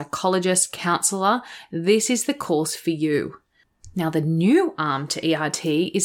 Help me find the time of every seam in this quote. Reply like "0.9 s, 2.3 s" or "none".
3.8 s